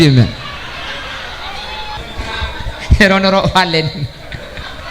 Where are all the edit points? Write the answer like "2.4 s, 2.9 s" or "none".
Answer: 2.0 s

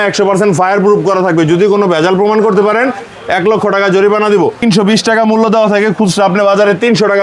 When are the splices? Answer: 4.6 s

